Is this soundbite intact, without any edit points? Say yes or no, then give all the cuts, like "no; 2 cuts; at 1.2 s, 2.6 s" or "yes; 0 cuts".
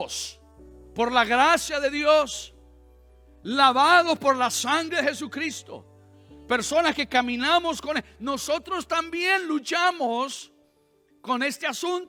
yes; 0 cuts